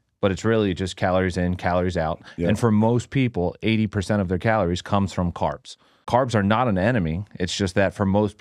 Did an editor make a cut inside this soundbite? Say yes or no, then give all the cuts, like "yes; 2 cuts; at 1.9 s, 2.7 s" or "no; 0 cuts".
yes; 1 cut; at 6.0 s